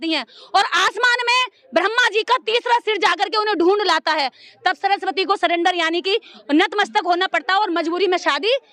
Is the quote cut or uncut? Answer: uncut